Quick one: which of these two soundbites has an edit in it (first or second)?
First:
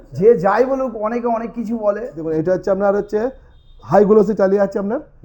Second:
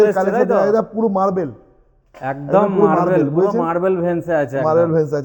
first